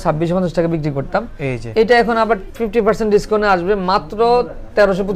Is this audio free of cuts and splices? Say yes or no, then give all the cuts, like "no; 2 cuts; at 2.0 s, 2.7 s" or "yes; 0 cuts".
yes; 0 cuts